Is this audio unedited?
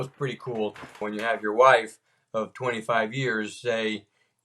no; 1 cut; at 1.0 s

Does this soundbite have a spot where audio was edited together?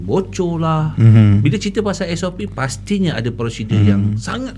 no; 0 cuts

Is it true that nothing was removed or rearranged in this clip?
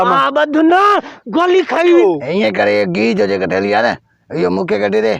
no; 1 cut; at 1.9 s

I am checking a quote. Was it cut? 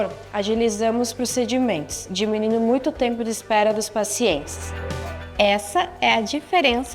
no; 0 cuts

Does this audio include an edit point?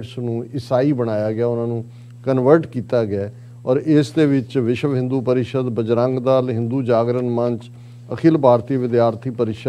no; 0 cuts

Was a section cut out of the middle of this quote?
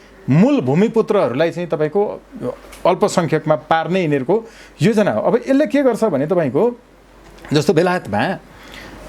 no; 0 cuts

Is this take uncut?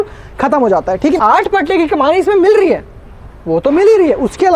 no; 1 cut; at 1.2 s

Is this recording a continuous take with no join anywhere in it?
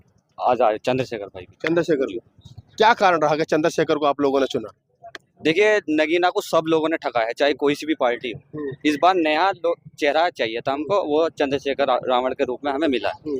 yes; 0 cuts

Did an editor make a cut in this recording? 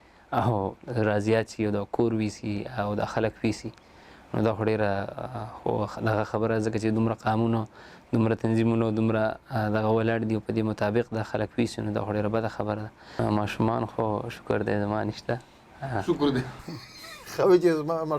yes; 1 cut; at 13.2 s

